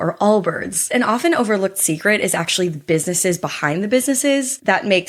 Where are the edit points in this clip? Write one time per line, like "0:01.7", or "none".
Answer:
0:00.9